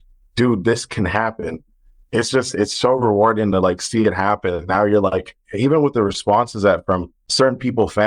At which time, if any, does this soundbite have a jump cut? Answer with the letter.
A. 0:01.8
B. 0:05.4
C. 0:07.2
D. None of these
C